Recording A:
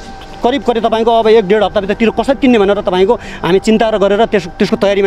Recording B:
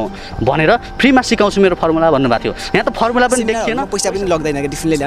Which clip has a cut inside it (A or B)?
B